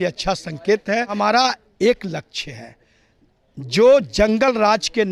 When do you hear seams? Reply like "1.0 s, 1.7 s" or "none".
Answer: 1.2 s